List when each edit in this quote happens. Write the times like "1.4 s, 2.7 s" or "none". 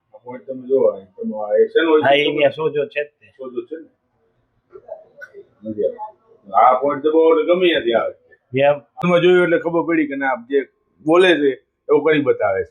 9.0 s